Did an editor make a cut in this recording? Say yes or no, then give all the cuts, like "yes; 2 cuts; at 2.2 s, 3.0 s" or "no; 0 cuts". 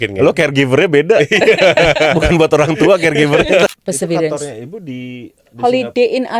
yes; 1 cut; at 3.7 s